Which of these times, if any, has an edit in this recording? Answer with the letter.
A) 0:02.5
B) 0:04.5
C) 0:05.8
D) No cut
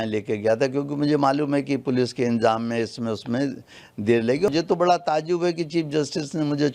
B